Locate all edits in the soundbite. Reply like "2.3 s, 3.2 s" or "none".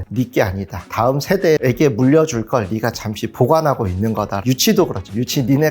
0.9 s, 4.4 s